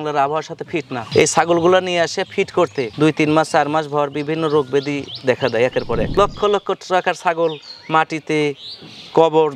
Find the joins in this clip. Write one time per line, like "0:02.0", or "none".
0:06.1